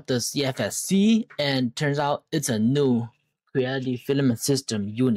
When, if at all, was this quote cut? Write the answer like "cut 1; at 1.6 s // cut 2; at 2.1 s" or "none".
none